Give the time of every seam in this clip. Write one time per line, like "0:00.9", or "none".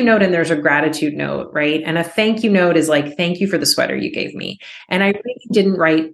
none

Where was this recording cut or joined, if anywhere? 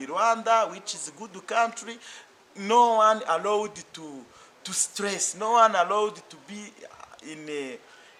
none

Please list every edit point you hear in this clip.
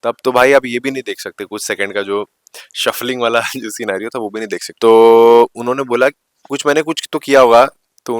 0:04.7

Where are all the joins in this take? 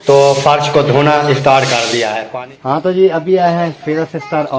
0:02.2

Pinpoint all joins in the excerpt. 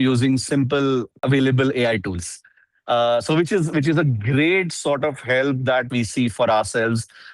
0:01.1
0:05.9

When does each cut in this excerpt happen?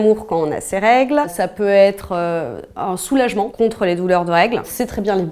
none

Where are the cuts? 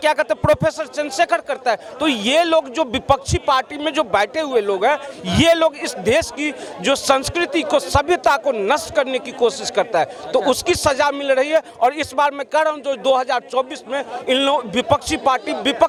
none

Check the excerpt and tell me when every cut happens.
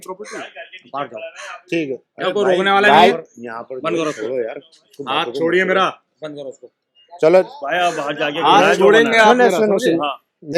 none

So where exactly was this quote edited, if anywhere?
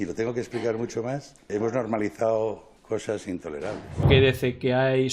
0:01.5
0:02.7
0:04.1

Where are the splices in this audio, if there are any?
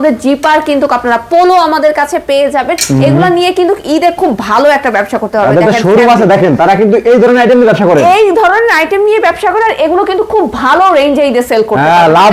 none

